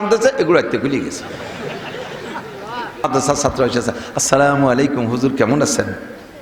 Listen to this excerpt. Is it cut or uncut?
cut